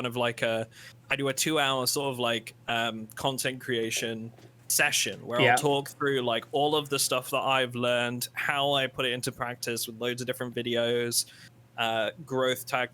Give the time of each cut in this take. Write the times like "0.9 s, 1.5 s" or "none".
none